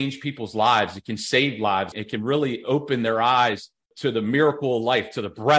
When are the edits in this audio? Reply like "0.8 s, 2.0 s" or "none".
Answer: 2.0 s, 3.9 s